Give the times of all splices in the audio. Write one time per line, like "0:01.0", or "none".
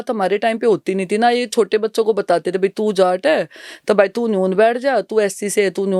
none